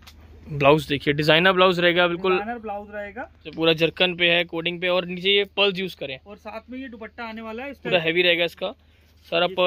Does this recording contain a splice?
yes; 2 cuts; at 3.5 s, 7.9 s

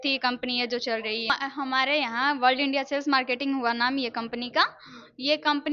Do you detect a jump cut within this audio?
yes; 1 cut; at 1.4 s

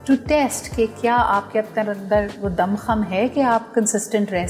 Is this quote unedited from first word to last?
yes; 0 cuts

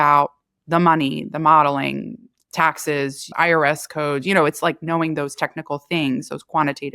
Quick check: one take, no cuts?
no; 1 cut; at 3.3 s

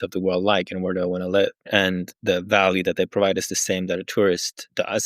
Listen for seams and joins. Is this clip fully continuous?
no; 1 cut; at 1.6 s

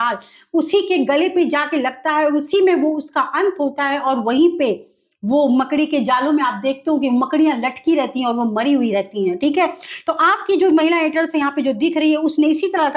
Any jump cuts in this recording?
no; 0 cuts

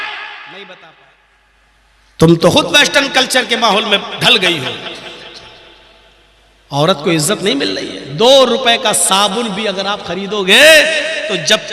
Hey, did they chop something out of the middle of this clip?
yes; 1 cut; at 1.0 s

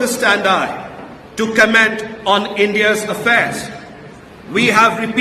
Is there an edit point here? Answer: no; 0 cuts

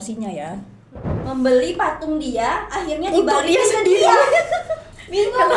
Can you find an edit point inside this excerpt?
yes; 1 cut; at 1.1 s

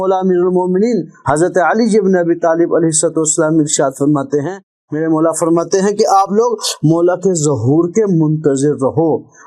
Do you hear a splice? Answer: no; 0 cuts

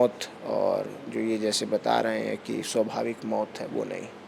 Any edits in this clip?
no; 0 cuts

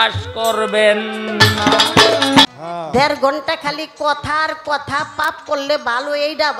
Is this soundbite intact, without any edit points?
no; 1 cut; at 2.5 s

